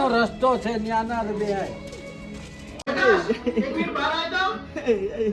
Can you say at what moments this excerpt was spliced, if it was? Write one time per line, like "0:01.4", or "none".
0:02.9

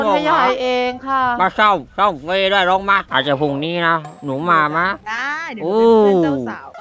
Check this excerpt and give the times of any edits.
0:03.1

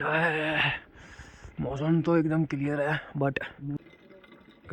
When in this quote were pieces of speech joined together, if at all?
0:03.8

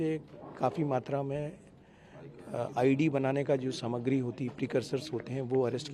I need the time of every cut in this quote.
none

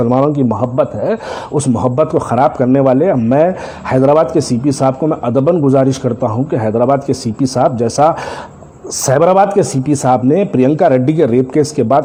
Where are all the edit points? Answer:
none

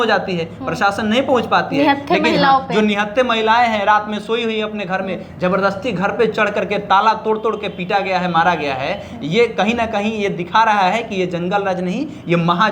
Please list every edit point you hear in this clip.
none

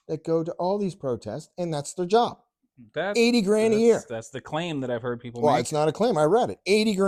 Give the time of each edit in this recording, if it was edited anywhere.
none

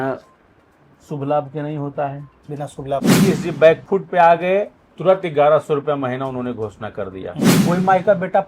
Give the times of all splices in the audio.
0:03.1
0:07.5

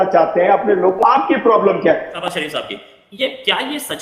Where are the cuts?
0:01.0
0:02.2

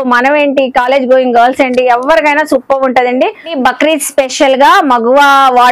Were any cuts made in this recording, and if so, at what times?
0:03.5

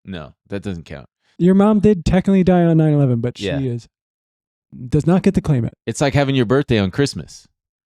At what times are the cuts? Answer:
0:01.3

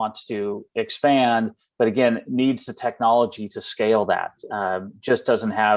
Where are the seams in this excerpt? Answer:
none

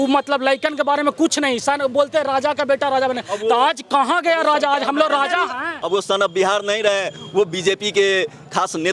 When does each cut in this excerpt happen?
0:05.7

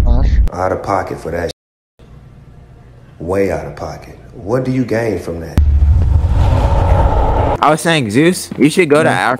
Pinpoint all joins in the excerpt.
none

